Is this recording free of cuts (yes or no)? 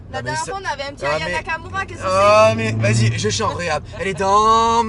yes